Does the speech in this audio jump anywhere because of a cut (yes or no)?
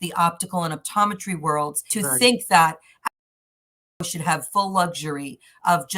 yes